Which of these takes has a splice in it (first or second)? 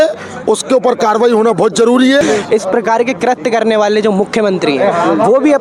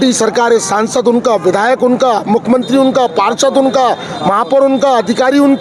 first